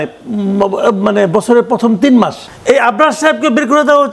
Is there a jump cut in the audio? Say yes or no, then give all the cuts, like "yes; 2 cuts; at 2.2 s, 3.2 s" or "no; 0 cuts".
yes; 1 cut; at 2.5 s